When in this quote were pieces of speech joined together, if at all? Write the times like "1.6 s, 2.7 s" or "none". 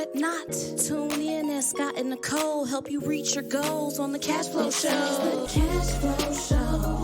5.5 s

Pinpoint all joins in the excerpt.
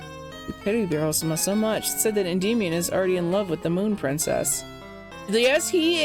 5.1 s

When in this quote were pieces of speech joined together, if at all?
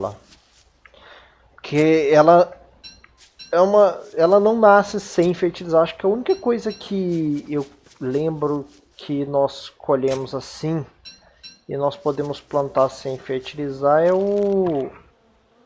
none

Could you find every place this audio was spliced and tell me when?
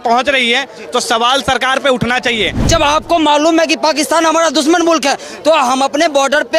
2.7 s

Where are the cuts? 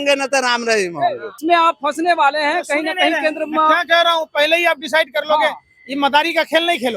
1.3 s

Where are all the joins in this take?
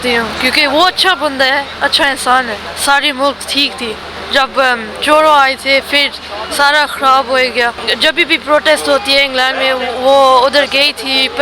2.6 s, 7.9 s

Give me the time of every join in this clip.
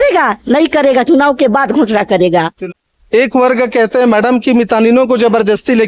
2.7 s

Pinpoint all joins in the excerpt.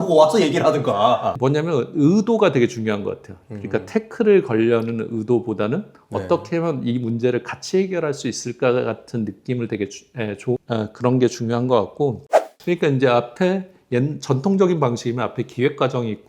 12.3 s

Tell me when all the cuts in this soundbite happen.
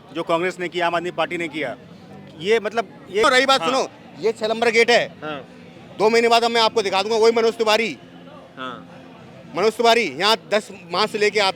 3.2 s

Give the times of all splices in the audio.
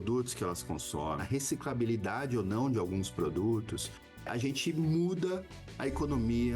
1.2 s, 4.2 s

